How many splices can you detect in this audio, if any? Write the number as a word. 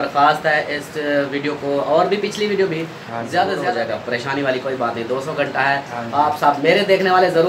one